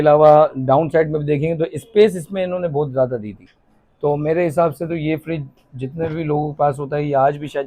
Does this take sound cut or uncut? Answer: uncut